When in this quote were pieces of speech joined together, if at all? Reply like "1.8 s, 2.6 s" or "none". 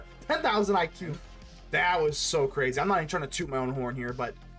1.0 s